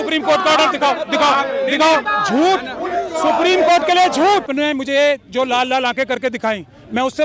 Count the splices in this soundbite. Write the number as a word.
two